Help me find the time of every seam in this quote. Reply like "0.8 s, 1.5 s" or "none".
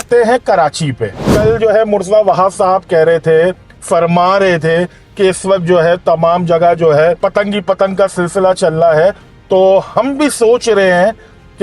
1.2 s